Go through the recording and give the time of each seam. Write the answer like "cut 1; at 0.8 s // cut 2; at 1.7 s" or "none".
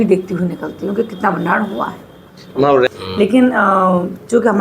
cut 1; at 2.9 s